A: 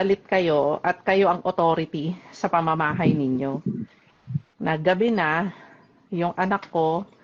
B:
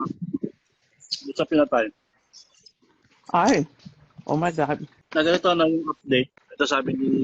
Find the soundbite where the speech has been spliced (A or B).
B